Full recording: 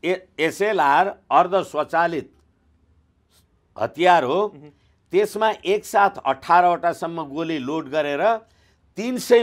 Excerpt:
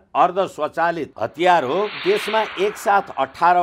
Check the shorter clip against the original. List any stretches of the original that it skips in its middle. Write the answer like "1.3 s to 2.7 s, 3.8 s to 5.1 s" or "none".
2.2 s to 3.7 s, 4.5 s to 5.0 s